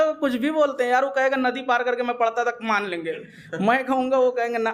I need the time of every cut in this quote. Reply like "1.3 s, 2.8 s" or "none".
none

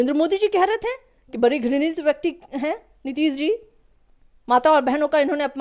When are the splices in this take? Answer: none

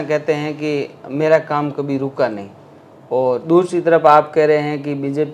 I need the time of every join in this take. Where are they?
none

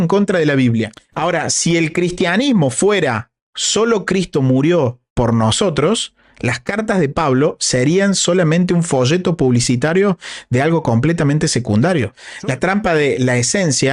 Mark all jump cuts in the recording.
1.0 s, 12.2 s

